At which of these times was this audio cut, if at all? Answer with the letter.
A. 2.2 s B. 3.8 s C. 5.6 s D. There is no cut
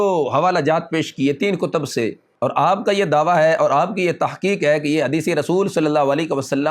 A